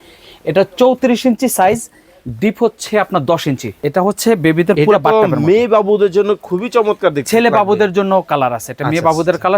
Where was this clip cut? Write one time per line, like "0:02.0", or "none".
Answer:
0:03.7